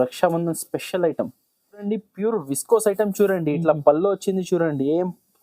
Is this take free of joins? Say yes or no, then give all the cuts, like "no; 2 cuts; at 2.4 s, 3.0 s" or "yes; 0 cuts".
yes; 0 cuts